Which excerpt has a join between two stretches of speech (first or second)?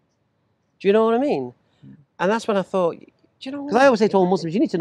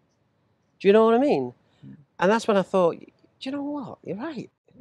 first